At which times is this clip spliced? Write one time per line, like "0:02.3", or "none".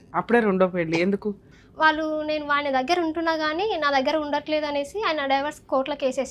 0:01.5